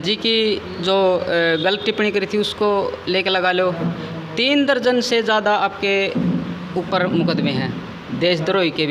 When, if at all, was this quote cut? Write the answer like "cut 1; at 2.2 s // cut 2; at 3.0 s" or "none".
none